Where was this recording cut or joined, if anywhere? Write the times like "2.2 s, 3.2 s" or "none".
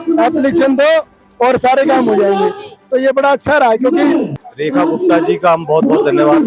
4.4 s